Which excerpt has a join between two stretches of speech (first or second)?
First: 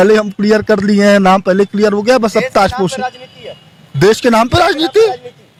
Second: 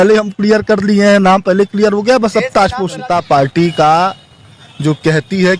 second